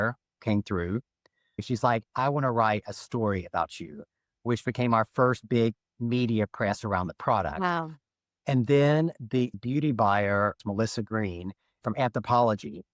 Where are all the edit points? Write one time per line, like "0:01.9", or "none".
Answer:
0:01.6
0:05.8
0:09.5
0:10.6